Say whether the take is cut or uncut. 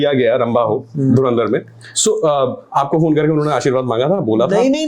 uncut